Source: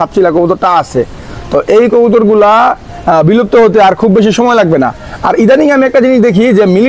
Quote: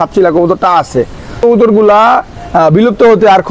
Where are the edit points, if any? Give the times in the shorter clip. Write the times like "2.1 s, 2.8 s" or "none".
1.4 s